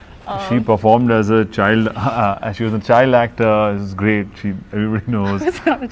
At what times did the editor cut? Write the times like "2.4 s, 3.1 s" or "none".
none